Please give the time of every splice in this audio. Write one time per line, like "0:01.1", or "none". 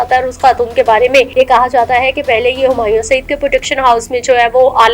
0:01.3